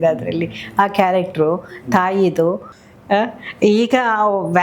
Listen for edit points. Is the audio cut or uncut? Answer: cut